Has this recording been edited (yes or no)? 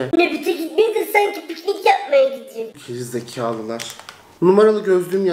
no